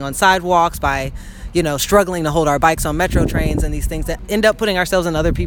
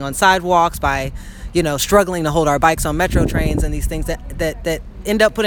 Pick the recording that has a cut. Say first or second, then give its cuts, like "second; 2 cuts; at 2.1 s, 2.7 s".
first; 1 cut; at 4.2 s